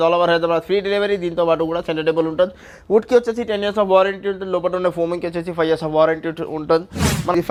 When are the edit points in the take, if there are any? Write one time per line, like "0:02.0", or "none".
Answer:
none